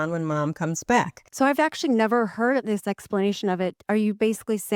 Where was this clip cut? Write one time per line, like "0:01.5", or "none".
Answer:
0:01.2
0:02.6
0:03.8